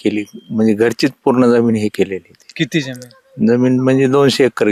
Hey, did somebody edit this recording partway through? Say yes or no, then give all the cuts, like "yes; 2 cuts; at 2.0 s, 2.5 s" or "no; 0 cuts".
no; 0 cuts